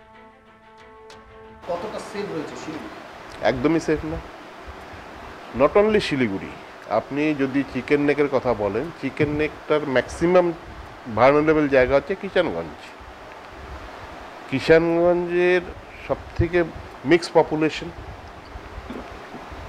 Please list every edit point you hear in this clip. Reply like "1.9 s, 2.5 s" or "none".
1.5 s